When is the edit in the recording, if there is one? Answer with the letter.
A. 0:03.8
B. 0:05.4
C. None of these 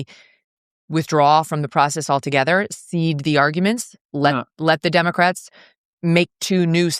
C